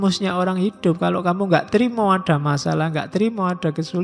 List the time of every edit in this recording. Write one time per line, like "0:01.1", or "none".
none

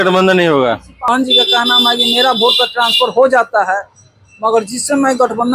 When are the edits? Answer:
0:01.1

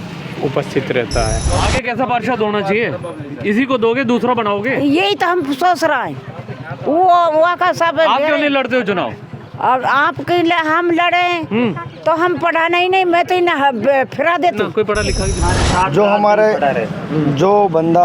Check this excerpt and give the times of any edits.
0:01.4
0:15.4

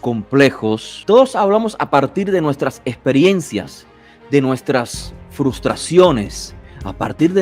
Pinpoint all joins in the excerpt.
0:00.9

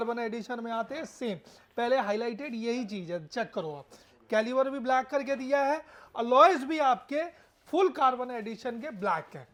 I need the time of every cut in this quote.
none

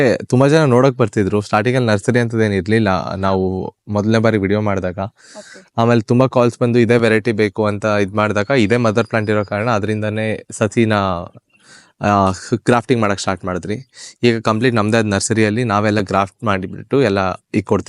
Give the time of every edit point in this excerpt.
none

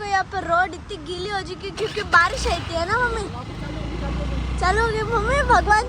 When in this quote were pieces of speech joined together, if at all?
none

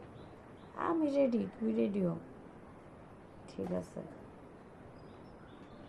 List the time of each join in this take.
0:01.0

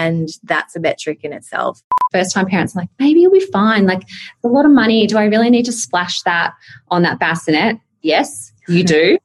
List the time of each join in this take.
0:01.9

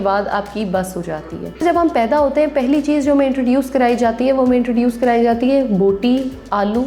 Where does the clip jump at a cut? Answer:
0:01.6

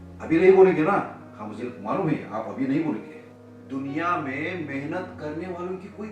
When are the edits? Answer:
none

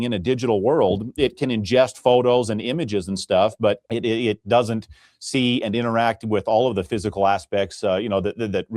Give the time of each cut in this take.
none

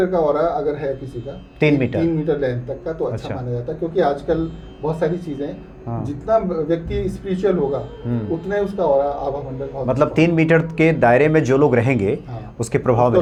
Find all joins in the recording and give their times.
none

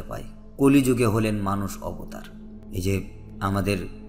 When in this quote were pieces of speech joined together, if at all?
0:02.0

